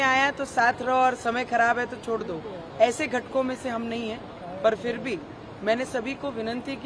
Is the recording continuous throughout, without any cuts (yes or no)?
yes